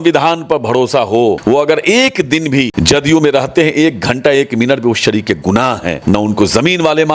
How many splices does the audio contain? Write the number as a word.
three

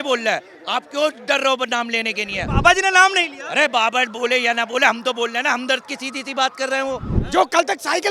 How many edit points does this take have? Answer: one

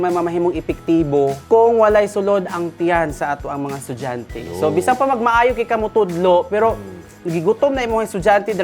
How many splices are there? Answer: one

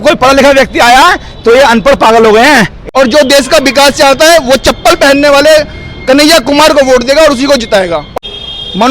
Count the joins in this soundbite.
two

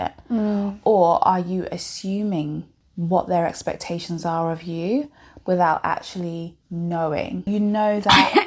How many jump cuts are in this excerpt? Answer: two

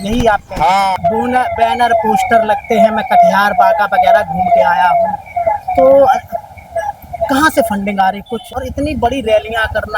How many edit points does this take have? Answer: two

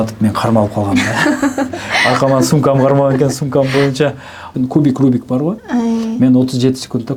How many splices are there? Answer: one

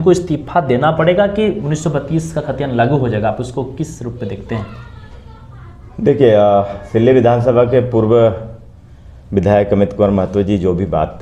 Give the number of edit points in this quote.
zero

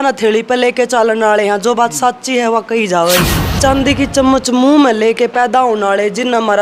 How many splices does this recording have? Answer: one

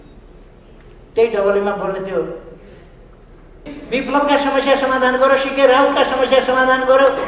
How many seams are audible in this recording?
one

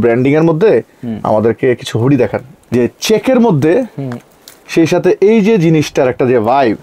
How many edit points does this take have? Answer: one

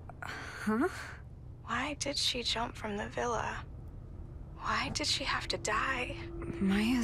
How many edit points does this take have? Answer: zero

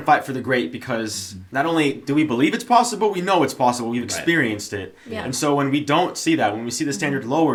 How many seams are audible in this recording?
zero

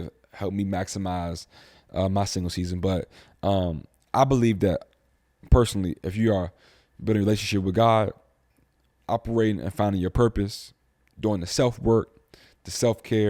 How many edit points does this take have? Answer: zero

